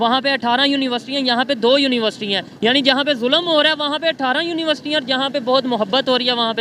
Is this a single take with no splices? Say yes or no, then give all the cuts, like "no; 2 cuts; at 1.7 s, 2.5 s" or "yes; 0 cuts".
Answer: yes; 0 cuts